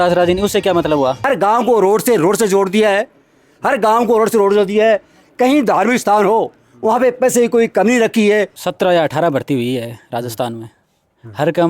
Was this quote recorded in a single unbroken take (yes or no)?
no